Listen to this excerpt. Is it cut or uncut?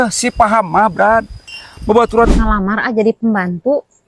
cut